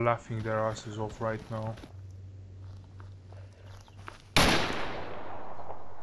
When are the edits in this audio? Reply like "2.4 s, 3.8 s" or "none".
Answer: 1.9 s